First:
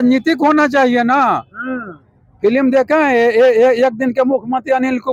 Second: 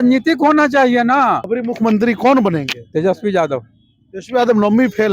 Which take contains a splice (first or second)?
second